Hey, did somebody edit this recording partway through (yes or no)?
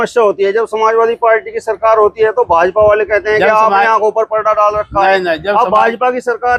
no